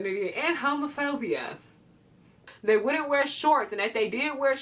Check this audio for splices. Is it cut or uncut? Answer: cut